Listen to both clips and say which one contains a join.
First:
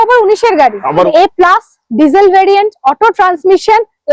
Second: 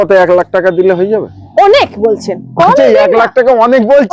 first; 1 cut; at 1.1 s

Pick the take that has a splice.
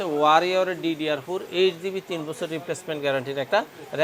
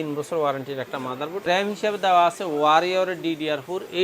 second; 1 cut; at 1.5 s

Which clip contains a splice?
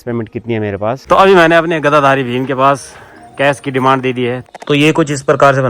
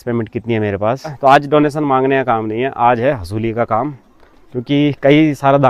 first; 2 cuts; at 1.0 s, 4.4 s

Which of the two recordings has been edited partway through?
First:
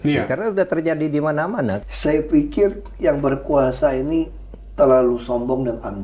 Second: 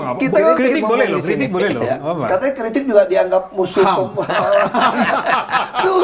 first; 1 cut; at 1.8 s

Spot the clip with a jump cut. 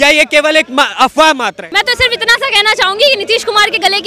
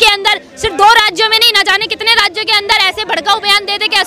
first; 1 cut; at 1.6 s

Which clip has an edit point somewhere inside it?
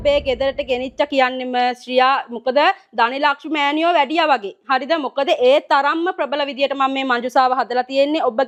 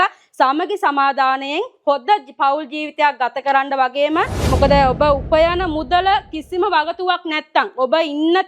second; 1 cut; at 4.4 s

